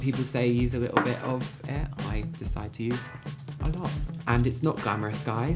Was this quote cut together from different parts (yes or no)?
no